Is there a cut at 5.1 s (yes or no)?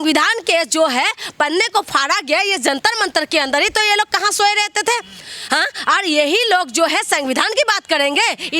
no